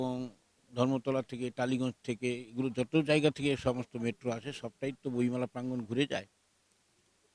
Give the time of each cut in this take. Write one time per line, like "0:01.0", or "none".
none